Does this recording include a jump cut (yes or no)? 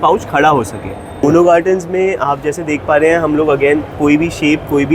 yes